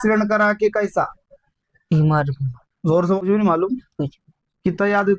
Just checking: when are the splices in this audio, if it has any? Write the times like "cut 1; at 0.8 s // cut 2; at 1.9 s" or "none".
cut 1; at 3.2 s